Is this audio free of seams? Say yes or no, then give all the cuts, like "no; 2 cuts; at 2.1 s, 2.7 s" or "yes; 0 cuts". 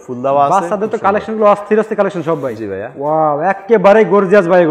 yes; 0 cuts